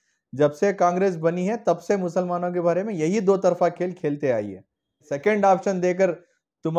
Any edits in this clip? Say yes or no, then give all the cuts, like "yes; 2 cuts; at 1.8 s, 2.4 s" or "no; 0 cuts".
yes; 1 cut; at 5.1 s